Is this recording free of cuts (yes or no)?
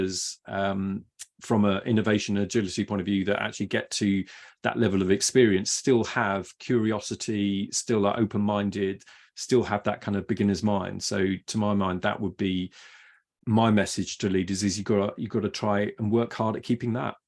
yes